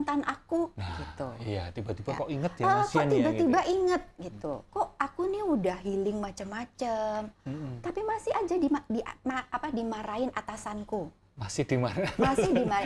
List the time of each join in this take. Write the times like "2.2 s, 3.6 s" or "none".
4.6 s